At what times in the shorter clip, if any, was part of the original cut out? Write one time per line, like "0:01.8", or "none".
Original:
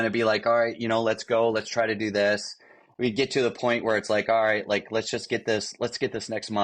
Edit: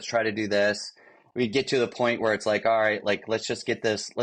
none